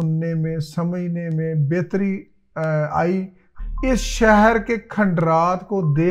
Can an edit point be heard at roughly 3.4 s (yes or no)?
yes